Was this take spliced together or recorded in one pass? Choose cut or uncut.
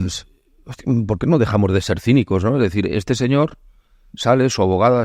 uncut